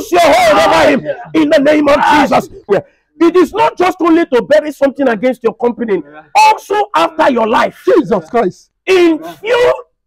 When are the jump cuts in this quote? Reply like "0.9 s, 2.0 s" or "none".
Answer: 2.7 s